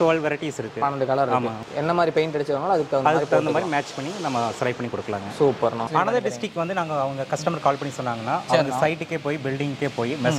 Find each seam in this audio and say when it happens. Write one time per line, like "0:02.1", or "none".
0:01.6
0:05.8